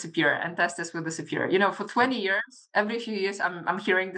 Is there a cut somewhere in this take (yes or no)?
no